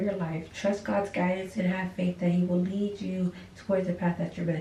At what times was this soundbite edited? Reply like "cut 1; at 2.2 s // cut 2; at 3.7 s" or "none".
none